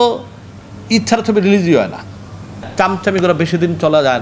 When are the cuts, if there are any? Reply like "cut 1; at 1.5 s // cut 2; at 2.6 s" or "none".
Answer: cut 1; at 2.7 s